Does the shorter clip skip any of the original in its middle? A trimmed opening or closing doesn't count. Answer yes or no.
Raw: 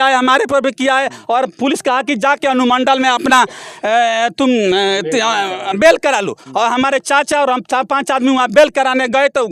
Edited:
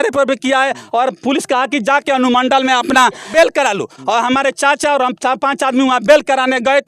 yes